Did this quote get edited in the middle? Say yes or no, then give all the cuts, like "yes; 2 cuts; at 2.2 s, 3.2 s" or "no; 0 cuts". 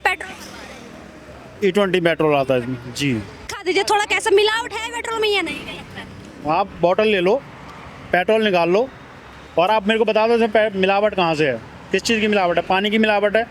yes; 1 cut; at 3.6 s